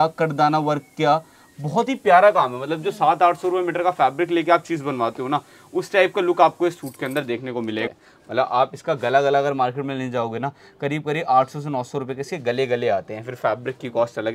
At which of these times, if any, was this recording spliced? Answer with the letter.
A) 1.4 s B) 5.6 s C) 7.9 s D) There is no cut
C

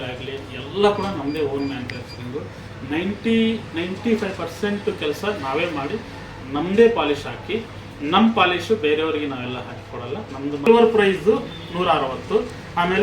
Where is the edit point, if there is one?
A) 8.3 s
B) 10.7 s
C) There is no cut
B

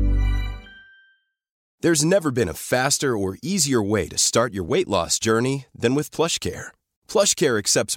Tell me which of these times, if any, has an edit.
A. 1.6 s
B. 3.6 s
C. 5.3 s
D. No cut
A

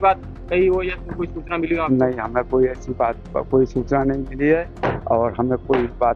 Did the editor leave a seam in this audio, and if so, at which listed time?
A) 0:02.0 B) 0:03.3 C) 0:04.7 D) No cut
C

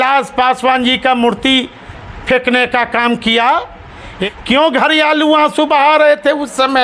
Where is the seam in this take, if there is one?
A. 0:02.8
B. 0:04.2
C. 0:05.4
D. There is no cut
B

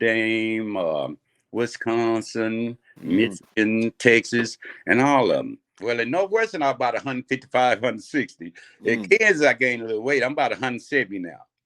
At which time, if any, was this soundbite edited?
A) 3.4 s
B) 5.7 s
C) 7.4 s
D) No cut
B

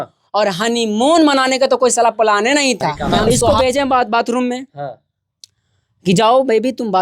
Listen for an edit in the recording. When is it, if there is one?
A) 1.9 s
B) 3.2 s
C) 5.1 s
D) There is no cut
B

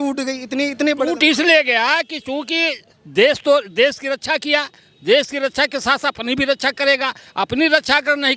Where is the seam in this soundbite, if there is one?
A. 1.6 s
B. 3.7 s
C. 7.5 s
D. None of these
D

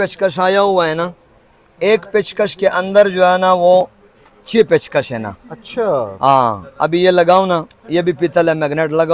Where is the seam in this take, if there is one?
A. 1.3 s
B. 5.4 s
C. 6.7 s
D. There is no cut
D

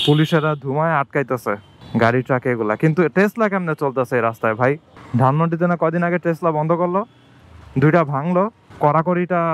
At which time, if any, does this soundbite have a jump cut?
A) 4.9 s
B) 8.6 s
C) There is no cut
B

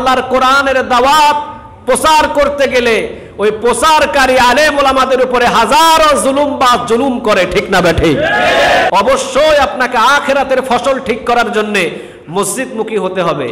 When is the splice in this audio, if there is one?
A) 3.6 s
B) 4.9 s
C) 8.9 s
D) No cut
C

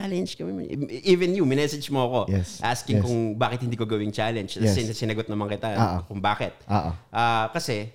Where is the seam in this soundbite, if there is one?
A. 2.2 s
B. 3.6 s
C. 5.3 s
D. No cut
D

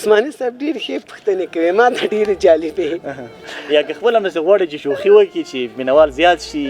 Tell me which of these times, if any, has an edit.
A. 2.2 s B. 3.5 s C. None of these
B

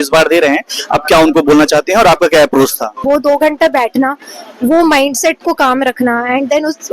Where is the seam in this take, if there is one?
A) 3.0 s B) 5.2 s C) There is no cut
A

